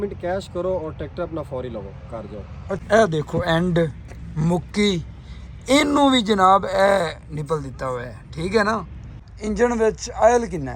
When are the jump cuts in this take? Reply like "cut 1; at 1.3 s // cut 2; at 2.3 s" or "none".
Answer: cut 1; at 2.8 s // cut 2; at 9.0 s